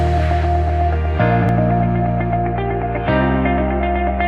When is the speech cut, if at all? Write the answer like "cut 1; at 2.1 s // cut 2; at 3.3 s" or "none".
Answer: cut 1; at 1.5 s